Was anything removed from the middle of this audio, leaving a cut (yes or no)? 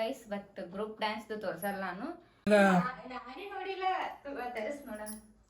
yes